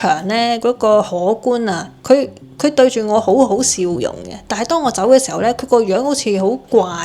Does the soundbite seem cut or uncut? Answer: uncut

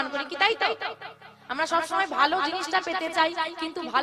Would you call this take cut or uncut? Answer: uncut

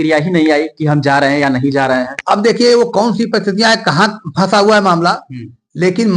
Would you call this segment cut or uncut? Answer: uncut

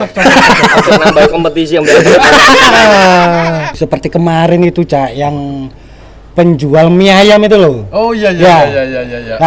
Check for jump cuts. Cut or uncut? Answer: cut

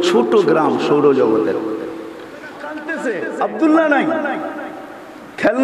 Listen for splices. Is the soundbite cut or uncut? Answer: cut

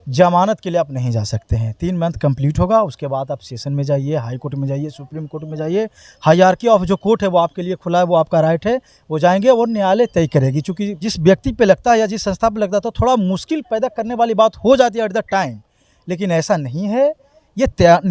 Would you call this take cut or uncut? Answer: cut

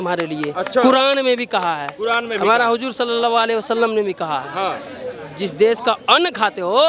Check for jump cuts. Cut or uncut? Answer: uncut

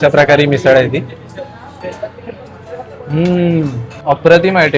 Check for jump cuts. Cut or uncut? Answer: cut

